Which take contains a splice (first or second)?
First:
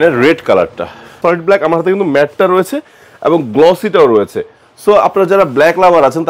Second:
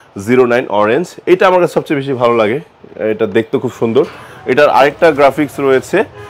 first